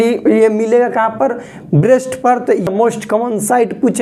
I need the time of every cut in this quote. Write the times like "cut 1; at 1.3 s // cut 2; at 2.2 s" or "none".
cut 1; at 2.7 s